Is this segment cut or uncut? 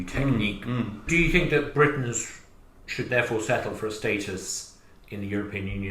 cut